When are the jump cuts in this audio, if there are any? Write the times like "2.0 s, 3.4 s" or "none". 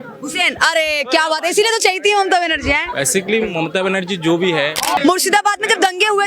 5.0 s